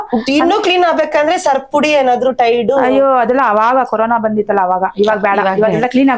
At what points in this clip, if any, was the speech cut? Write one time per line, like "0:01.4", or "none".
none